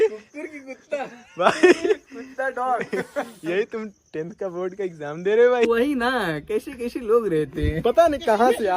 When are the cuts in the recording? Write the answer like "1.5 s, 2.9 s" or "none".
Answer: 5.7 s